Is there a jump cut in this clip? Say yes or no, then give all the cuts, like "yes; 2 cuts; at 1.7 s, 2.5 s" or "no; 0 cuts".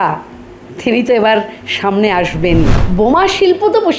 yes; 1 cut; at 2.8 s